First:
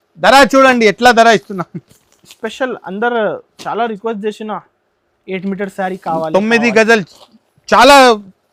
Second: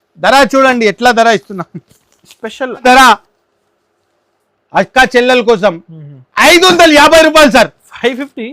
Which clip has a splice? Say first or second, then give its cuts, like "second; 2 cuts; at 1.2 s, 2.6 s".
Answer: second; 1 cut; at 2.8 s